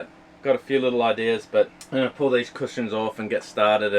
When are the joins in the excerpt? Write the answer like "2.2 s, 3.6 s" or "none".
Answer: 1.8 s